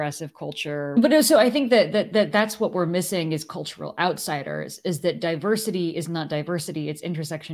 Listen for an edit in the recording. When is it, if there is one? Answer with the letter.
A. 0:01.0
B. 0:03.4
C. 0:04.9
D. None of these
A